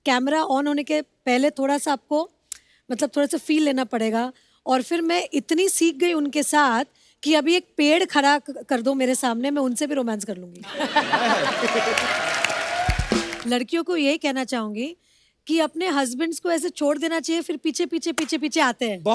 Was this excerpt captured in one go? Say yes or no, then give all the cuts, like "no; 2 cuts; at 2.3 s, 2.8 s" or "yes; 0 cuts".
no; 1 cut; at 13.3 s